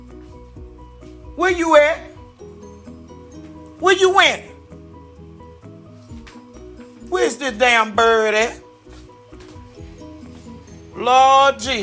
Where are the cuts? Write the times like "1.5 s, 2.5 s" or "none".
1.4 s, 8.5 s, 10.9 s